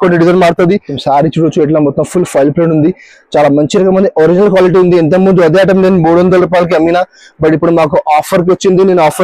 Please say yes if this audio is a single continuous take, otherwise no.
no